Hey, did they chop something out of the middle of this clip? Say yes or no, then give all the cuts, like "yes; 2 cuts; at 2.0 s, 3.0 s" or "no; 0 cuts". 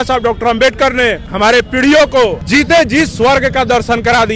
yes; 2 cuts; at 1.2 s, 2.4 s